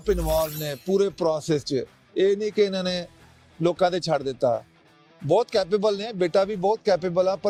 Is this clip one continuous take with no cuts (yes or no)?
yes